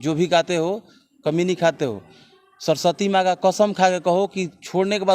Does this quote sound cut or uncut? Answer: uncut